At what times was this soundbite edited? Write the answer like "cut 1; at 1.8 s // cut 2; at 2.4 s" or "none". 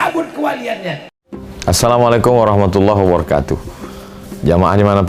cut 1; at 1.1 s